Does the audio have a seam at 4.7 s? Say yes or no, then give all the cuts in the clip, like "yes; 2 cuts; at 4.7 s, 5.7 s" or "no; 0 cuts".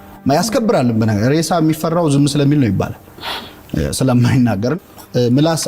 yes; 1 cut; at 4.7 s